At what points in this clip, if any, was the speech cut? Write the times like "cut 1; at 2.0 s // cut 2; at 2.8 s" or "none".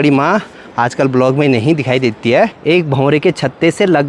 cut 1; at 2.6 s